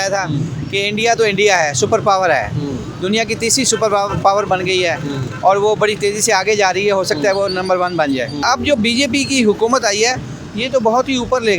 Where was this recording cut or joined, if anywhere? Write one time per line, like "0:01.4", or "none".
0:08.4